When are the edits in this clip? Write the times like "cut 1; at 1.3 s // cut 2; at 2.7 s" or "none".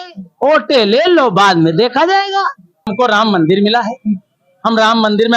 cut 1; at 2.9 s

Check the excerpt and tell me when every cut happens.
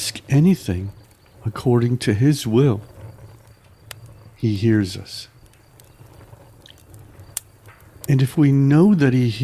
cut 1; at 2.8 s // cut 2; at 4.4 s // cut 3; at 5.1 s // cut 4; at 8.1 s

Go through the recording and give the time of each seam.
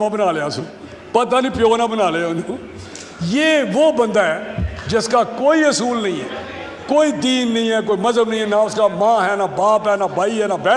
none

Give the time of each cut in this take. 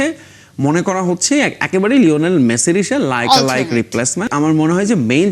cut 1; at 4.2 s

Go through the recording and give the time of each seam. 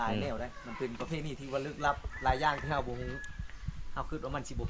none

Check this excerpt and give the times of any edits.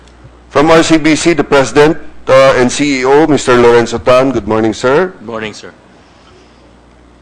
none

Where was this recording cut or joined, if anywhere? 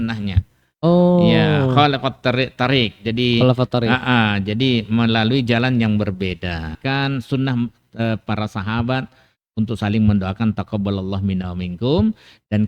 cut 1; at 6.8 s

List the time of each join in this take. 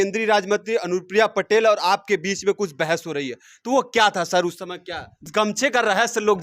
cut 1; at 5.2 s

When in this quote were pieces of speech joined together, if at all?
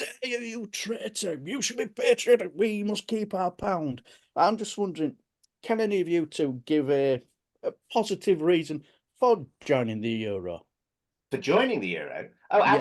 none

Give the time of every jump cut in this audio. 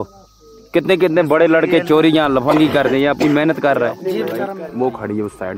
cut 1; at 4.6 s

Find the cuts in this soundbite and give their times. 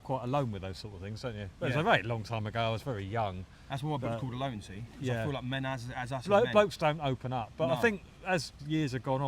none

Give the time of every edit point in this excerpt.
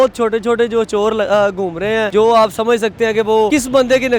cut 1; at 2.1 s // cut 2; at 3.5 s

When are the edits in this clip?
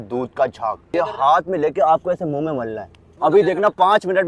cut 1; at 0.8 s // cut 2; at 3.2 s

